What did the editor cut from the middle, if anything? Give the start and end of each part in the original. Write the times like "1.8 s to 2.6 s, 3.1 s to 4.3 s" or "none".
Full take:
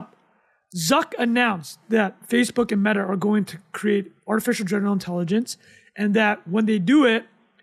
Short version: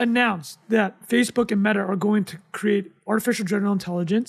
none